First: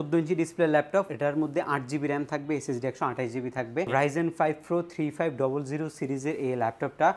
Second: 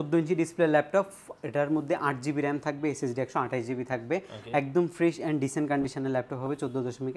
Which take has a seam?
first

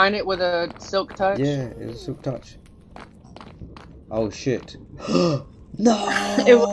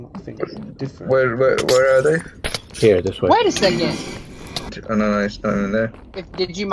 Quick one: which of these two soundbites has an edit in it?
second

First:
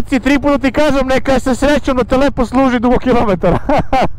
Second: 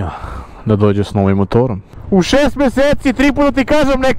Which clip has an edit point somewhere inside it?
second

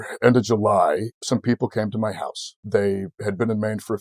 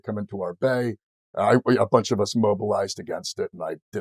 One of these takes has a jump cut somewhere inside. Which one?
first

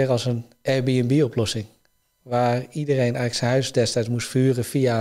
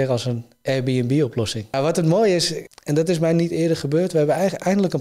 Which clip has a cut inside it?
second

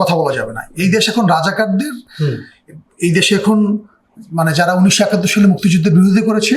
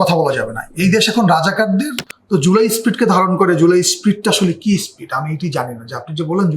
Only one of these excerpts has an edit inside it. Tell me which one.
second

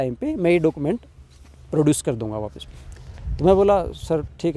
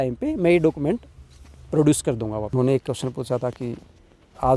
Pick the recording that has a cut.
second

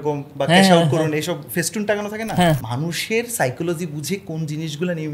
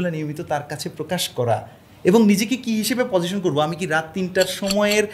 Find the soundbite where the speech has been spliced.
first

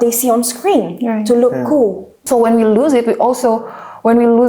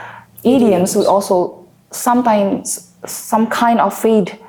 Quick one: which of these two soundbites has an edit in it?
first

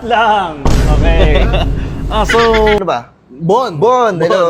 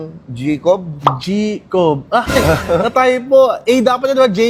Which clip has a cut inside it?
first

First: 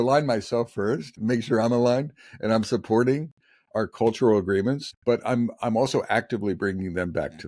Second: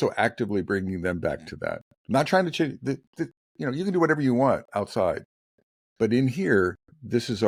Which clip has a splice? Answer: first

